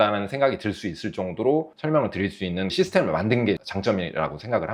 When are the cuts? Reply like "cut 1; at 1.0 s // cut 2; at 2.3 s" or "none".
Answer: none